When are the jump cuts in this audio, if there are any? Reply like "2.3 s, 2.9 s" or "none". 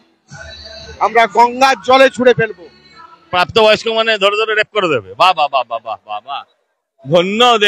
3.3 s